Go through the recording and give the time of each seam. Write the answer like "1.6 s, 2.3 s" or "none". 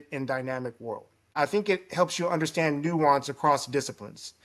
1.3 s